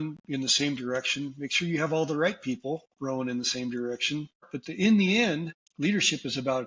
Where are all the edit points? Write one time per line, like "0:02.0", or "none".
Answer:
0:04.6
0:05.6

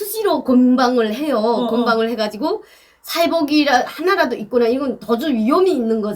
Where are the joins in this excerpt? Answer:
none

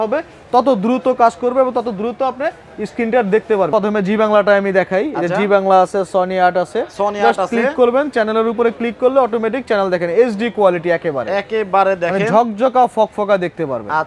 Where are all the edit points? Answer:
0:03.7

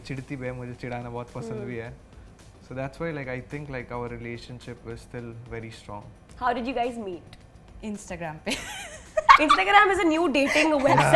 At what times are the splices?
none

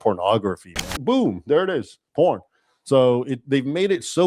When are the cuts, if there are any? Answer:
0:00.9

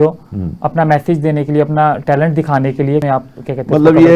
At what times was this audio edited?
0:03.0

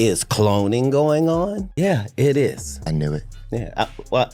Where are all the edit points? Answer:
0:01.6
0:02.7

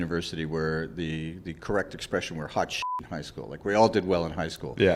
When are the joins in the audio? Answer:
none

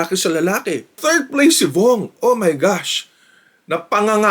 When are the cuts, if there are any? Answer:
0:01.0

